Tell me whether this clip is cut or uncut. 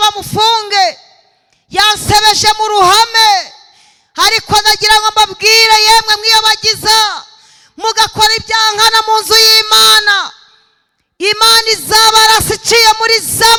uncut